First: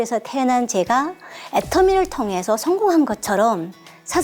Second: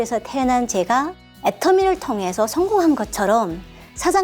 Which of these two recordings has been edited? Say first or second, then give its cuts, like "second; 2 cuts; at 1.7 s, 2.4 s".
second; 1 cut; at 1.2 s